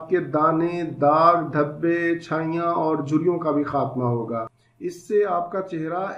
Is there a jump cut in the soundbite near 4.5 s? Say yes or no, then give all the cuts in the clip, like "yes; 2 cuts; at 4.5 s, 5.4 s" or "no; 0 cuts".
yes; 1 cut; at 4.5 s